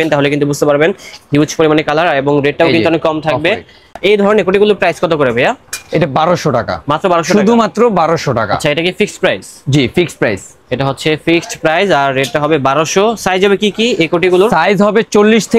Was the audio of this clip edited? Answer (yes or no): no